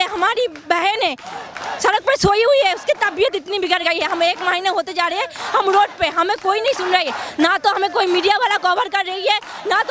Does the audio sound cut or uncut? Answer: uncut